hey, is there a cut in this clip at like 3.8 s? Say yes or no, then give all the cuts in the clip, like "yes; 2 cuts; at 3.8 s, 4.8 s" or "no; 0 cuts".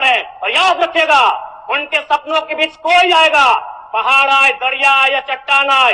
no; 0 cuts